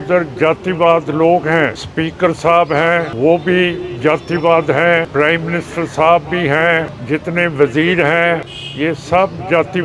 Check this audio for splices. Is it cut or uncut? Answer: cut